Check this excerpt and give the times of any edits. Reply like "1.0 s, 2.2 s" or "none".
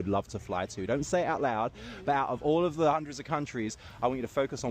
1.4 s